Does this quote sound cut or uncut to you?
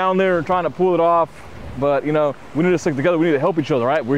uncut